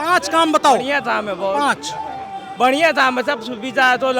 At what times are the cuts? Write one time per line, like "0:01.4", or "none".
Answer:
none